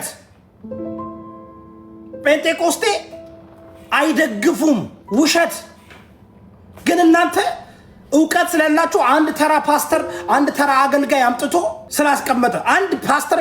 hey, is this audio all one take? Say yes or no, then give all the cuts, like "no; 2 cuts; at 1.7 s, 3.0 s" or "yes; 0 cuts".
no; 1 cut; at 11.8 s